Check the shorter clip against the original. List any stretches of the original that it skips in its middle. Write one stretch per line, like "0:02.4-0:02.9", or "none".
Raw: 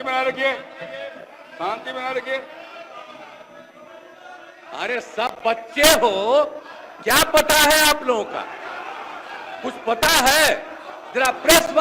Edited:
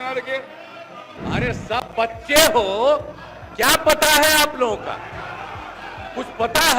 0:03.0-0:04.5